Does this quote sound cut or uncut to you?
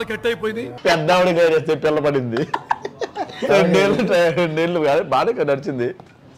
cut